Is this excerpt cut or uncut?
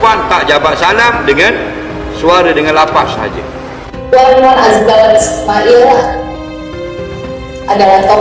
cut